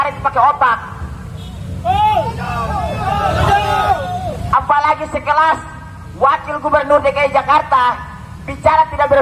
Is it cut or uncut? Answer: uncut